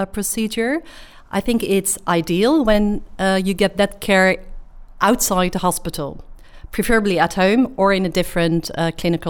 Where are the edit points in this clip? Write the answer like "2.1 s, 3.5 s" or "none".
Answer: none